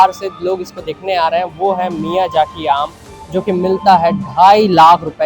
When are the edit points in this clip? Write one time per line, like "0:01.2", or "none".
none